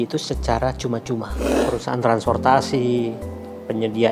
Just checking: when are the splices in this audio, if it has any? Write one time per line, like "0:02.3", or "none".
0:01.6